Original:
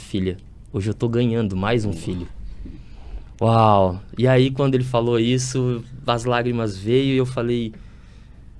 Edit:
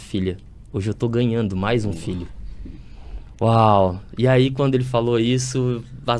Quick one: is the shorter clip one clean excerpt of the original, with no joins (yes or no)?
yes